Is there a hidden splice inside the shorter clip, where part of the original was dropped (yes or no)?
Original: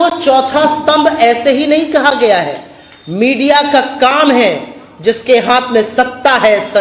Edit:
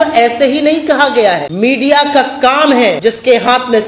yes